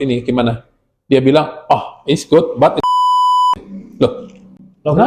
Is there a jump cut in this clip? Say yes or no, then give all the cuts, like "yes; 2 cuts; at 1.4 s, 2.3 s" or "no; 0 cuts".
no; 0 cuts